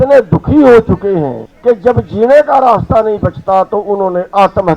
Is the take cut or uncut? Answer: cut